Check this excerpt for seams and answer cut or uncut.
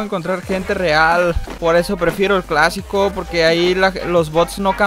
cut